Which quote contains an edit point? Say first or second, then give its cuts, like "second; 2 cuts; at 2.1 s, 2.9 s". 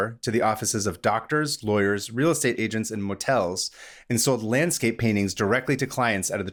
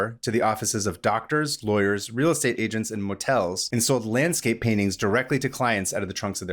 second; 1 cut; at 3.6 s